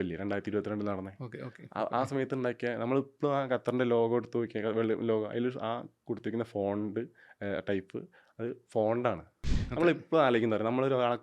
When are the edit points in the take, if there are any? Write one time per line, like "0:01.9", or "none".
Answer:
0:09.6